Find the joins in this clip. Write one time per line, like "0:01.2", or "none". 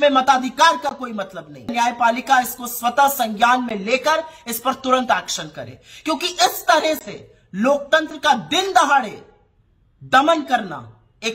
0:01.7